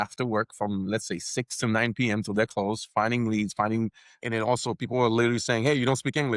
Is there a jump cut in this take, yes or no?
yes